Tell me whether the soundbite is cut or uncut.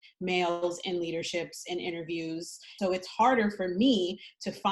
cut